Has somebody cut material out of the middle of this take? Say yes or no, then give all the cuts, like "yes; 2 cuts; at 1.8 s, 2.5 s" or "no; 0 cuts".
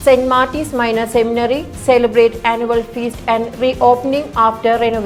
no; 0 cuts